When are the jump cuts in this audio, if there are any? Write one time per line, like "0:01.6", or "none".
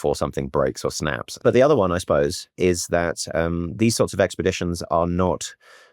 0:01.4